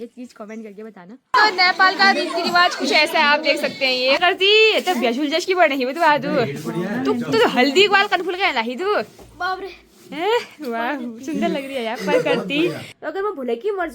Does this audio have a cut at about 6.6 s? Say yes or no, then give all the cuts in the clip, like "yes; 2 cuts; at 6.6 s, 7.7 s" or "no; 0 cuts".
no; 3 cuts; at 1.3 s, 4.2 s, 12.9 s